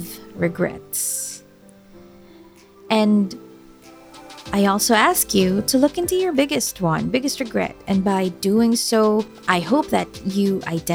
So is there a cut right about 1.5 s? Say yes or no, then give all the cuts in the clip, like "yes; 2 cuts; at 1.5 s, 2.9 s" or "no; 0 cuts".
no; 1 cut; at 9.4 s